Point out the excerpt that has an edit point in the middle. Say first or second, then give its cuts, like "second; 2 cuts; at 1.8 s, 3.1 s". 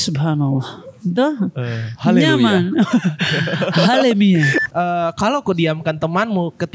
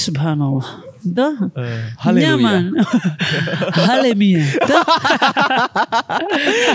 first; 1 cut; at 4.5 s